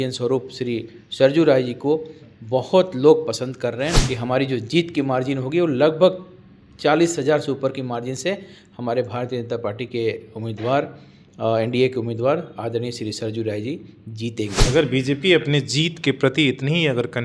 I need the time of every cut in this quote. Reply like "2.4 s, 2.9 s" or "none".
4.0 s, 14.7 s